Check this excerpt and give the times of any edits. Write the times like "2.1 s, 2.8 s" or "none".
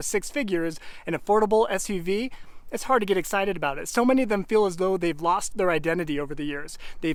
none